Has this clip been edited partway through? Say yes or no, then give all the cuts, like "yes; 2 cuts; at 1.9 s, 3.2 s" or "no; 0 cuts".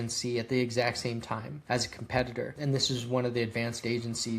yes; 2 cuts; at 1.5 s, 2.5 s